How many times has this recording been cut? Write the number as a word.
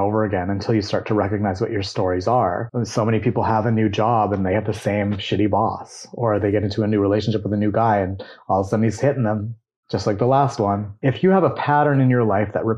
two